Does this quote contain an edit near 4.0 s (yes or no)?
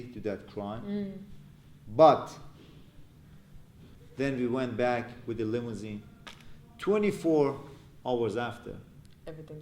yes